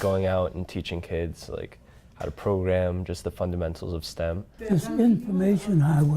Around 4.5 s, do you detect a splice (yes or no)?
yes